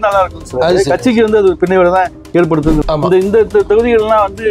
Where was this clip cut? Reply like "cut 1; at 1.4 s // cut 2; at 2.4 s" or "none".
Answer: cut 1; at 2.8 s